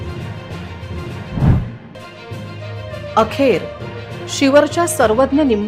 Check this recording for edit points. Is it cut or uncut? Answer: cut